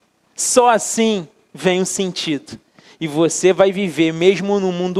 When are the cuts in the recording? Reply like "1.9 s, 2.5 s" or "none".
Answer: none

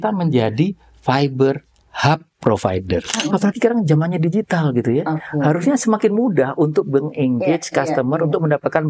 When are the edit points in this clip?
3.2 s

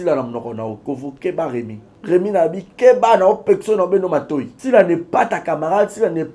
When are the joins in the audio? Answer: 1.8 s, 4.5 s

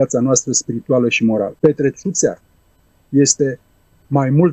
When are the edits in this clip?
1.5 s

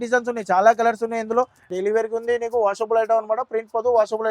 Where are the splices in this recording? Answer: 1.7 s

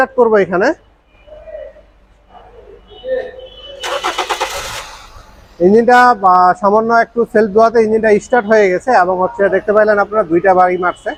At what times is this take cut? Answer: none

